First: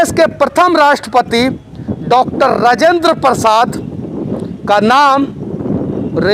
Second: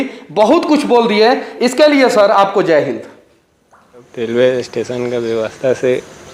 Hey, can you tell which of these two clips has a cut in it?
second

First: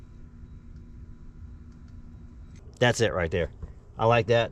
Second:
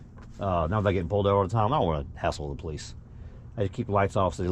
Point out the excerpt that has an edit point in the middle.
first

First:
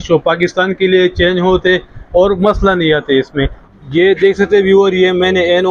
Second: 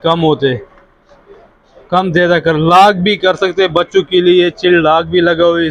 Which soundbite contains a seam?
first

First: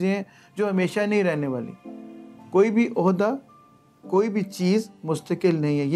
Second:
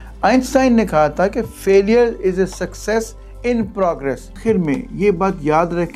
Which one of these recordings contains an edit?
second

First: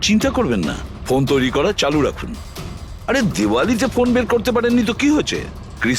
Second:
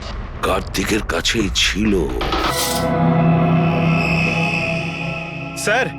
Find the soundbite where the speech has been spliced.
second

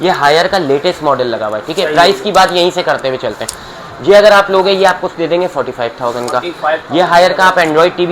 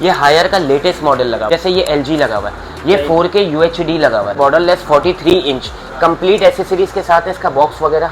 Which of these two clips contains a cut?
second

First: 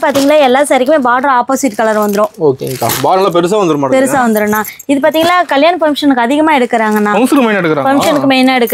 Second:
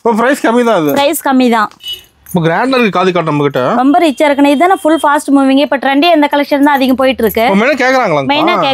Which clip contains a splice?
second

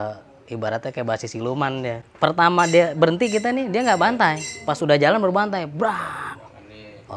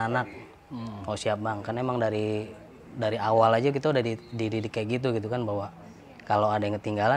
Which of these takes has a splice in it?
first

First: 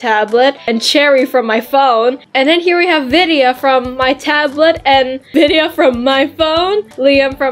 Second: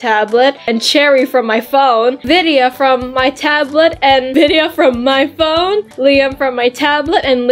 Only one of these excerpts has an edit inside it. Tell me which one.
second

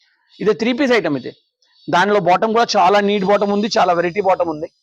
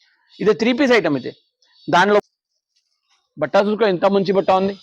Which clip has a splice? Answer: second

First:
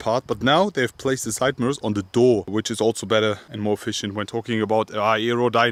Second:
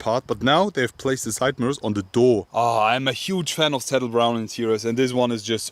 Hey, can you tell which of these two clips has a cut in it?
second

